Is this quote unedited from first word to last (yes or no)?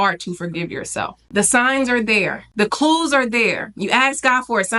no